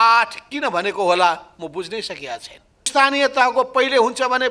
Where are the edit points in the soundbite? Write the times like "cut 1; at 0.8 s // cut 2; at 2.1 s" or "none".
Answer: cut 1; at 2.9 s